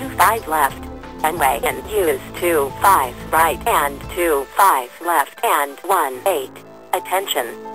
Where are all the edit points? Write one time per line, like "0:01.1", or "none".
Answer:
0:00.7
0:06.5